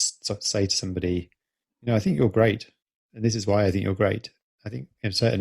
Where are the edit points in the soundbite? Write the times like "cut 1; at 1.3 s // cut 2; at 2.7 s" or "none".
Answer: none